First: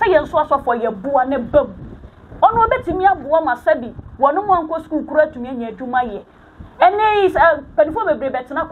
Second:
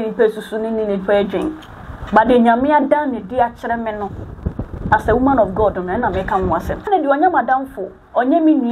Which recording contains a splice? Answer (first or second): second